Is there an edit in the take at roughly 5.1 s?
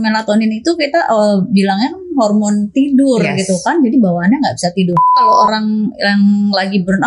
yes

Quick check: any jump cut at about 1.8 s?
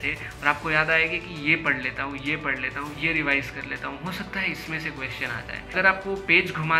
no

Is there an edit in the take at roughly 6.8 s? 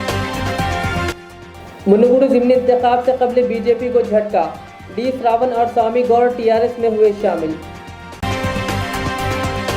no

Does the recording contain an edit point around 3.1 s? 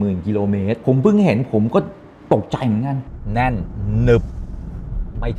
yes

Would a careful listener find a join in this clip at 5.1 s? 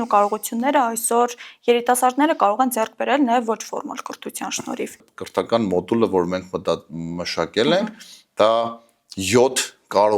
yes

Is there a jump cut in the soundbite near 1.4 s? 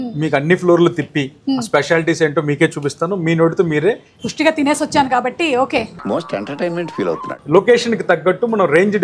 no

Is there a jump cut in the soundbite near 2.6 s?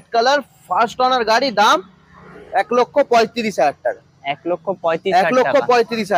no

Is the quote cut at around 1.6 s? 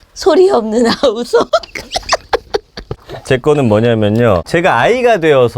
no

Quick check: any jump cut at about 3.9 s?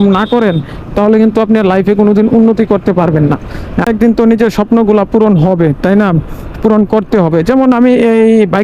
yes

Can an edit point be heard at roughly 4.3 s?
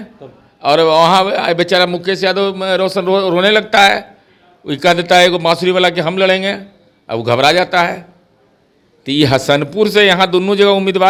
no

